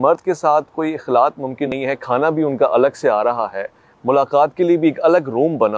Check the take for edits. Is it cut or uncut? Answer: cut